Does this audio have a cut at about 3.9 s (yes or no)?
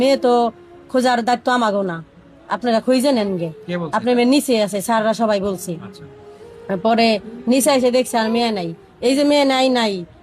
no